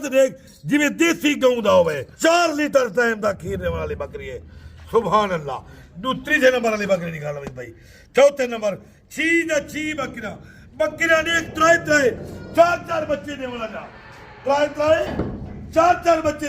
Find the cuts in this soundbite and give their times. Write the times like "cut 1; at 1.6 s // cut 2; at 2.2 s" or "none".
cut 1; at 2.1 s